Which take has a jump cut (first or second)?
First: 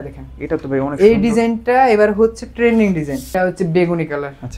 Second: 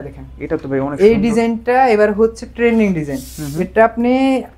first